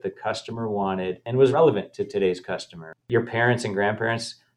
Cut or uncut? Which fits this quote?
cut